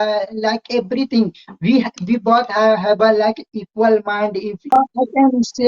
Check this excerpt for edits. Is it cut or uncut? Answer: cut